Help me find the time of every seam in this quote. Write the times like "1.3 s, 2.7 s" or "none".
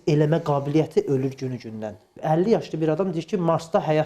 2.2 s

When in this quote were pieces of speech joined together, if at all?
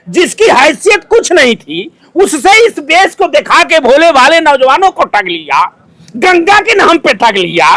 none

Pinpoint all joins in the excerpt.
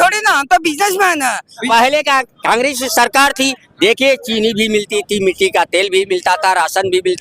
1.5 s

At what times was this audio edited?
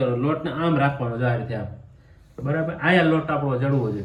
none

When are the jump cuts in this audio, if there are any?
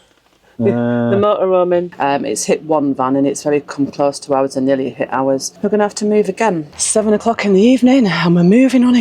1.9 s, 5.5 s, 6.7 s

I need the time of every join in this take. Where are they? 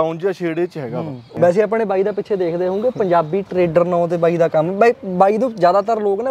1.2 s

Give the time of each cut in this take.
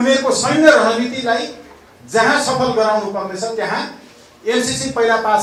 none

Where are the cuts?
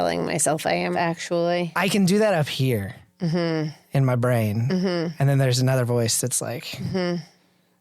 0.9 s, 1.7 s

